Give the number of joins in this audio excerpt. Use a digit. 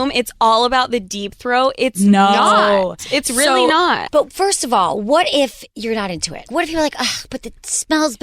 2